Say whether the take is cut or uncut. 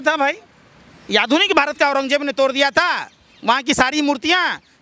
uncut